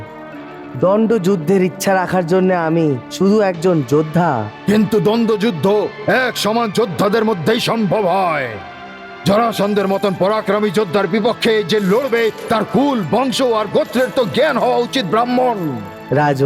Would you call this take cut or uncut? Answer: uncut